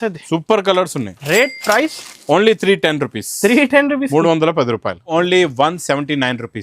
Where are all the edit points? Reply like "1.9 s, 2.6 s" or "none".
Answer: 5.1 s